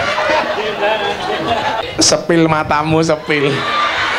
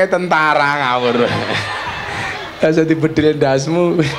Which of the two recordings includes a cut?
first; 1 cut; at 1.8 s

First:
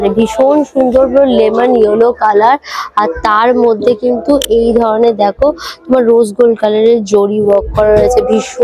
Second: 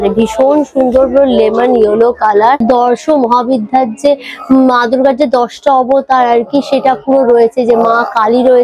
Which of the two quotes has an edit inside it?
second; 1 cut; at 2.6 s

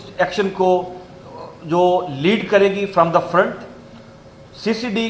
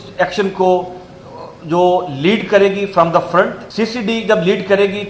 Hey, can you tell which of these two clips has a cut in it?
second; 1 cut; at 3.6 s

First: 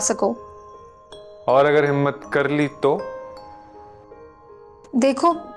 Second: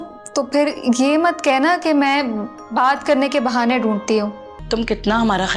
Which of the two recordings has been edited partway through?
second; 1 cut; at 4.5 s

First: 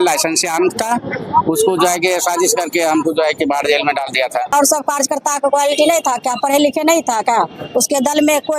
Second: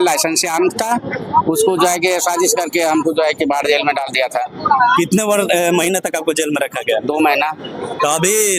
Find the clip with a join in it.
first; 1 cut; at 4.5 s

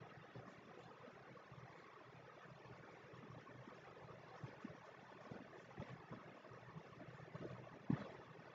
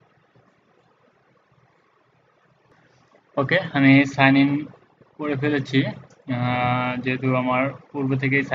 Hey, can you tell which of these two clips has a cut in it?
second; 1 cut; at 2.7 s

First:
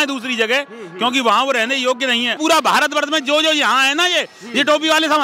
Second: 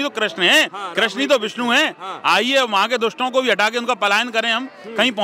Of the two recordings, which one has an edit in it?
first; 1 cut; at 2.4 s

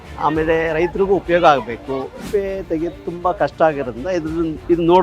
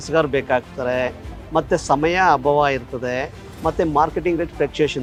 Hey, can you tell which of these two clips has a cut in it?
first; 1 cut; at 2.2 s

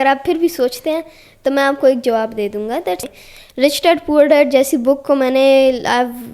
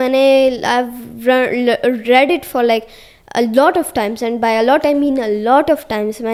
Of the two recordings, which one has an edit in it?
first; 1 cut; at 3.0 s

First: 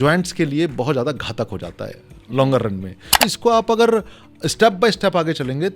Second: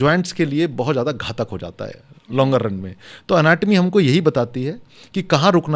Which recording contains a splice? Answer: first; 1 cut; at 3.2 s

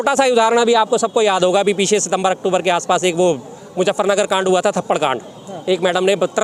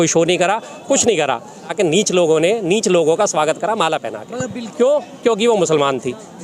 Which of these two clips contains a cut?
second; 2 cuts; at 1.7 s, 4.6 s

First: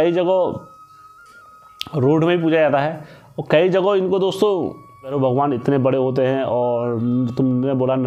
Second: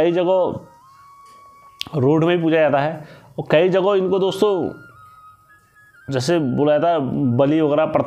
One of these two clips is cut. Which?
first; 1 cut; at 5.1 s

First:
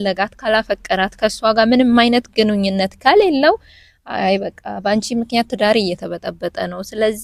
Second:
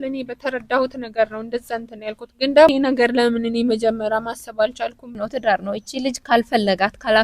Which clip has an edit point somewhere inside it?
second; 2 cuts; at 2.7 s, 5.2 s

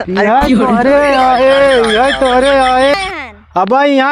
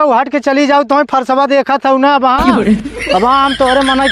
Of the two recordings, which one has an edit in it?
first; 1 cut; at 2.9 s

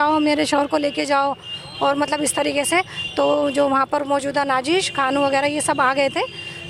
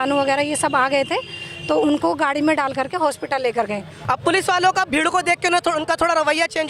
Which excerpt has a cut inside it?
second; 1 cut; at 3.9 s

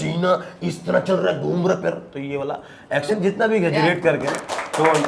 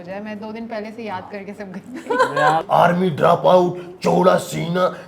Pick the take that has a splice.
second; 1 cut; at 2.6 s

